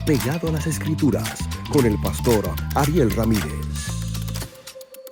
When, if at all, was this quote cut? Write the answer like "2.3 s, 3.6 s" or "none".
none